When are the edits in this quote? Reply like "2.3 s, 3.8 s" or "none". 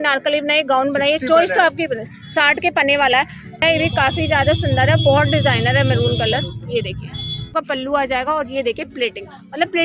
3.6 s, 7.5 s